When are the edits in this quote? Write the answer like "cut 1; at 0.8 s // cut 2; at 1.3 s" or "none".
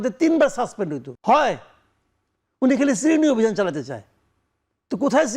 cut 1; at 1.1 s